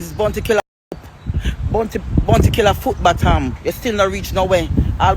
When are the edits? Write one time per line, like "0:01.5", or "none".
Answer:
0:03.5